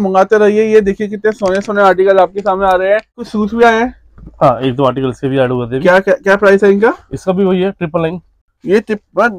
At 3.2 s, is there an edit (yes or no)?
yes